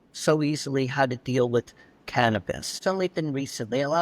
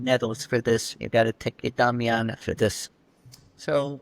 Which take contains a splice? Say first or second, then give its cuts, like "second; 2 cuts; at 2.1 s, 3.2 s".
first; 1 cut; at 2.7 s